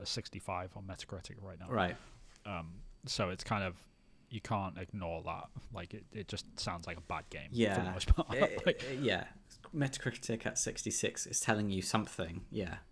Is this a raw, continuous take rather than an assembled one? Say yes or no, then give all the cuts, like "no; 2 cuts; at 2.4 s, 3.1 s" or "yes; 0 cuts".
yes; 0 cuts